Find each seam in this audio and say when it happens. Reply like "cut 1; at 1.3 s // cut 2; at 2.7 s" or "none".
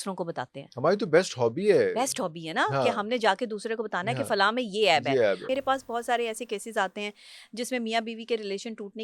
cut 1; at 5.4 s